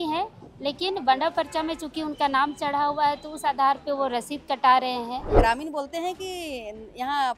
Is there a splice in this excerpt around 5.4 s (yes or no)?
yes